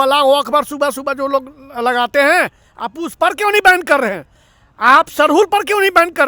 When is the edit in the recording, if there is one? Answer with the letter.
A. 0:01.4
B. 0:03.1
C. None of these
C